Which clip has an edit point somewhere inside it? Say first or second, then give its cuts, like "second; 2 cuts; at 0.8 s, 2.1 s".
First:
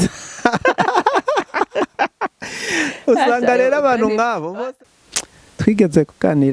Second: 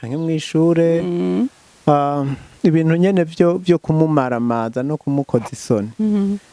first; 1 cut; at 4.6 s